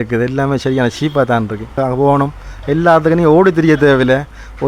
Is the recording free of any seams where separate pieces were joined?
no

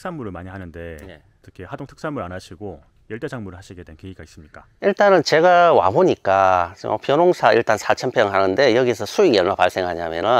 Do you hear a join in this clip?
no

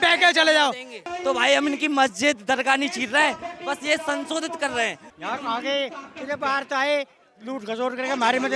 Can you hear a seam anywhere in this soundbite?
yes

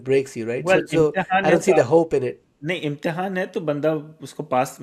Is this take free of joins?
yes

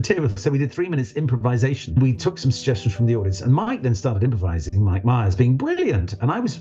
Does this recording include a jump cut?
yes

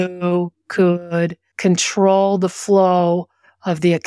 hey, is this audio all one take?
no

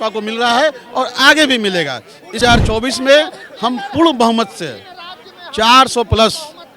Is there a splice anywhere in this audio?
yes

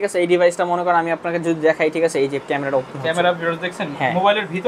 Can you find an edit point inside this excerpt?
no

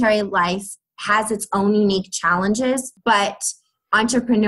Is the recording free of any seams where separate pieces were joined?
no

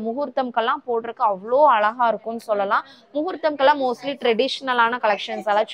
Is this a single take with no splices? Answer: yes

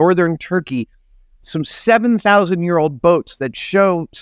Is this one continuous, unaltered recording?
yes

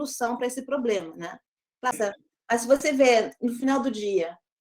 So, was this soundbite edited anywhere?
yes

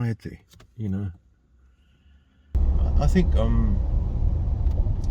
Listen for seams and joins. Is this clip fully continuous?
no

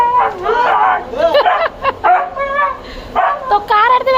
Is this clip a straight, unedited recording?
yes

